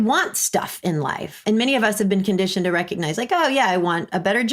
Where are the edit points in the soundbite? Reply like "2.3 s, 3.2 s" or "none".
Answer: 1.4 s

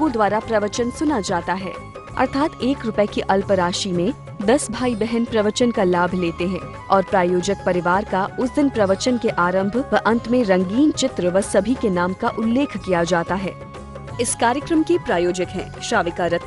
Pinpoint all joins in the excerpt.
13.5 s

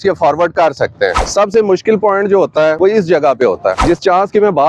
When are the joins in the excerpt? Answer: 1.2 s, 2.8 s, 3.8 s

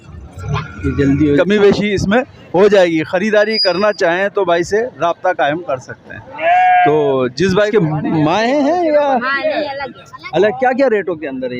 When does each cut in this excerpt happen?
1.4 s, 7.7 s

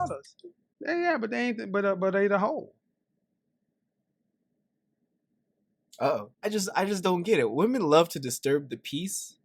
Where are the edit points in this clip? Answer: 6.3 s

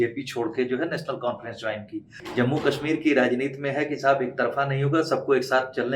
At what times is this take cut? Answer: 2.2 s

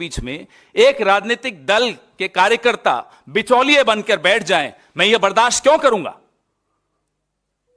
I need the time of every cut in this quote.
none

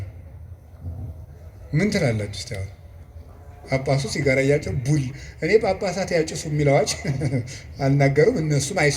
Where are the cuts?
none

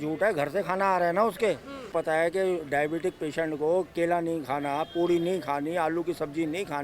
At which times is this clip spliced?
1.9 s

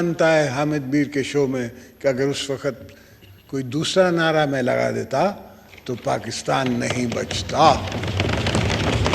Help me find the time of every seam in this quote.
none

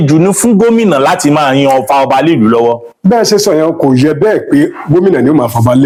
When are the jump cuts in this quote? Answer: none

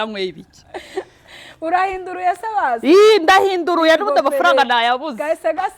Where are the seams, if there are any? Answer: none

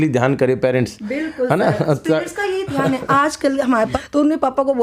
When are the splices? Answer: 3.9 s

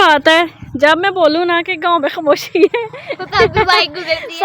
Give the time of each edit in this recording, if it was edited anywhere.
none

